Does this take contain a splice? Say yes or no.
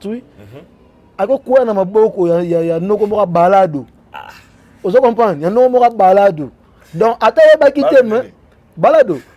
no